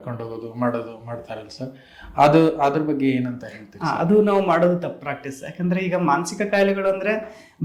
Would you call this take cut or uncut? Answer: uncut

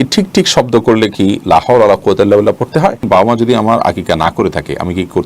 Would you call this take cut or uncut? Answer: cut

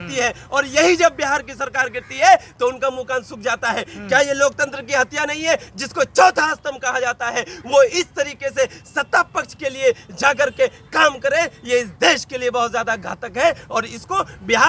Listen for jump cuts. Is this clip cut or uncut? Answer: uncut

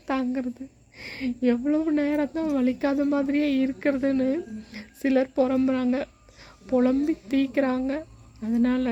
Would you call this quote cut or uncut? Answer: uncut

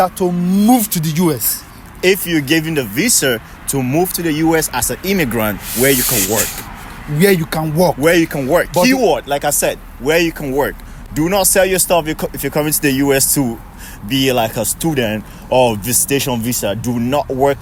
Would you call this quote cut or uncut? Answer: uncut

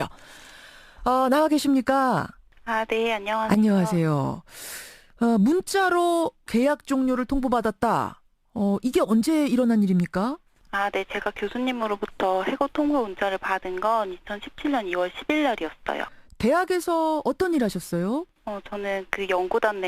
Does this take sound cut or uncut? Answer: cut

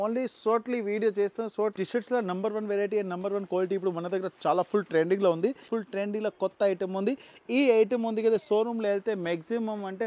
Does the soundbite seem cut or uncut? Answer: cut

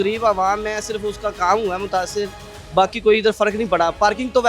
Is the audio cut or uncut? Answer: uncut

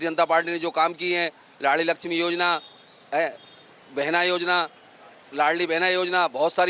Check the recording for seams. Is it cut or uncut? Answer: uncut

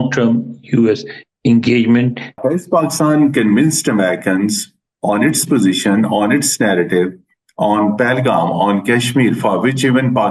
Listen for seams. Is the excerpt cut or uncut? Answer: cut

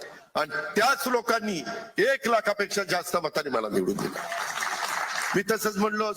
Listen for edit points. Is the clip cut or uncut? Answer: uncut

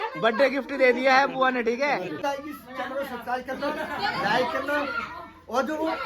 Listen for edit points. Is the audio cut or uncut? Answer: cut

